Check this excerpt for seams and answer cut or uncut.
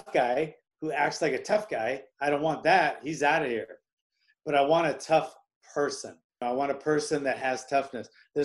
cut